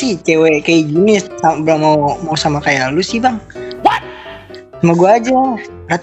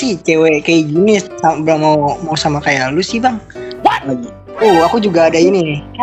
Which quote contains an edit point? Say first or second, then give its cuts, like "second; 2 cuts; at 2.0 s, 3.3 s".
second; 1 cut; at 4.1 s